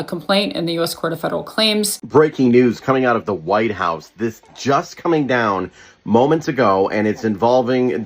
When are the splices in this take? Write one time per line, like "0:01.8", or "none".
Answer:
0:02.0